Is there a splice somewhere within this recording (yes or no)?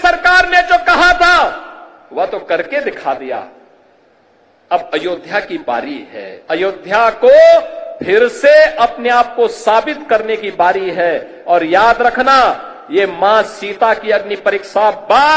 no